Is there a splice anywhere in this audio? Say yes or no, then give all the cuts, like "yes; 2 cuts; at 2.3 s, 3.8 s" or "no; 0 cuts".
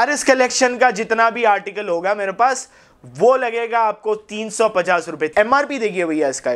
yes; 1 cut; at 5.3 s